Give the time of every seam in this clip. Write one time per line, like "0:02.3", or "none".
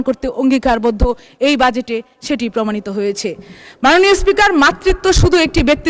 none